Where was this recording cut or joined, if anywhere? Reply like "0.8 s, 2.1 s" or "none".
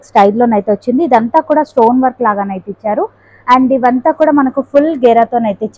none